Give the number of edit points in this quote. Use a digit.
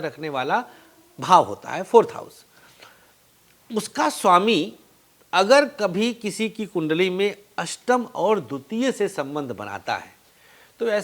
0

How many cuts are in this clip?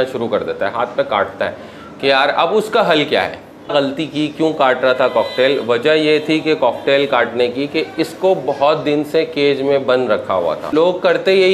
2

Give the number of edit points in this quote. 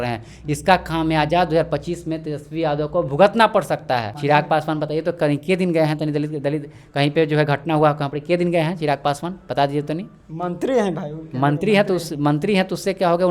1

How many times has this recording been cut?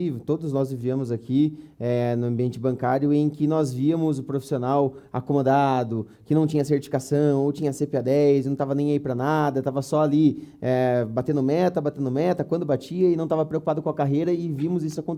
0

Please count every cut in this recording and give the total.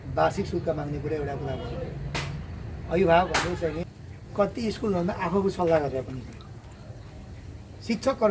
1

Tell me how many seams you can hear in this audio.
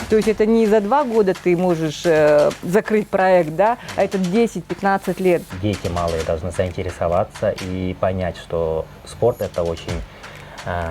1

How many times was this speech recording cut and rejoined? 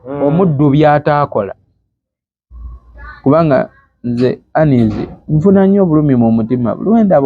0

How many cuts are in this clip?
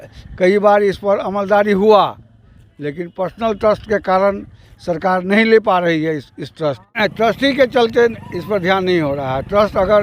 1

